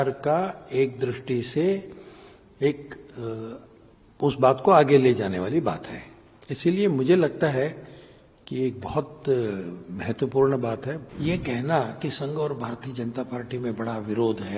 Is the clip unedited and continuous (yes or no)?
no